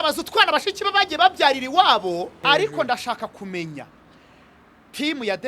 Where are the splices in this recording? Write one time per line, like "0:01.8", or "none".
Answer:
0:02.4